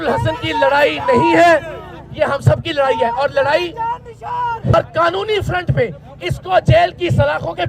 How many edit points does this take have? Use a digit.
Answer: 1